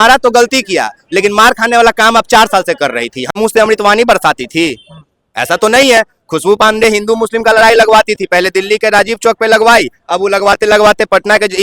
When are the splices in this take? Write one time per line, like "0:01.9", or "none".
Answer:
0:03.4